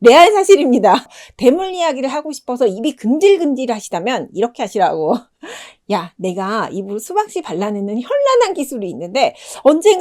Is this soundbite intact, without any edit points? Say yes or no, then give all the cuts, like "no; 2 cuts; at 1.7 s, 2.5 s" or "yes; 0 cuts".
no; 1 cut; at 1.2 s